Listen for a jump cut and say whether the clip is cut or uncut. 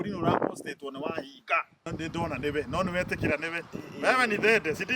cut